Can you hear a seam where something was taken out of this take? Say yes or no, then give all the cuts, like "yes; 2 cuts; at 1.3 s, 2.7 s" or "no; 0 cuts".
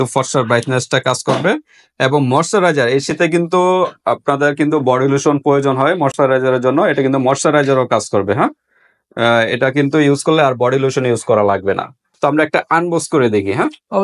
no; 0 cuts